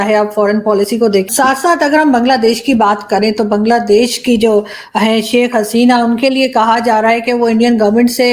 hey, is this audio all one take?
no; 1 cut; at 1.3 s

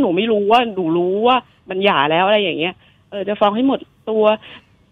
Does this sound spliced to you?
no; 0 cuts

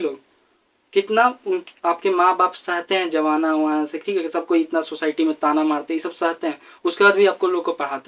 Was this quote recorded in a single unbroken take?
yes; 0 cuts

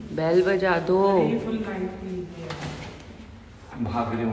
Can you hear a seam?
no; 0 cuts

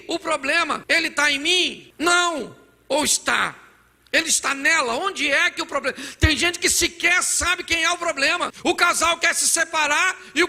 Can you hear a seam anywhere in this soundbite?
yes; 3 cuts; at 0.8 s, 1.8 s, 8.5 s

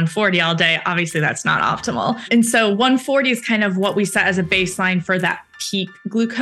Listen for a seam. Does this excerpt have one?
yes; 1 cut; at 2.2 s

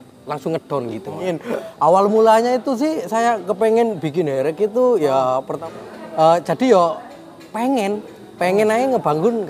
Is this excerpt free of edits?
no; 2 cuts; at 1.2 s, 5.6 s

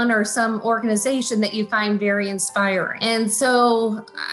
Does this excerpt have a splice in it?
yes; 1 cut; at 2.9 s

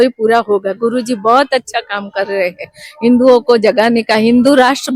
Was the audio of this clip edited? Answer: no; 0 cuts

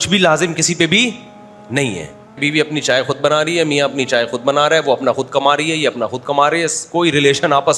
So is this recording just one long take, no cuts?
no; 1 cut; at 2.4 s

